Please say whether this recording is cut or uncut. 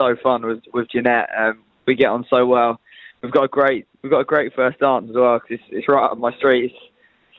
uncut